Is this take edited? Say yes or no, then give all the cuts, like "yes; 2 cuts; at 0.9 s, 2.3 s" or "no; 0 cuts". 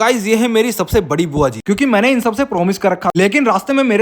yes; 2 cuts; at 1.6 s, 3.1 s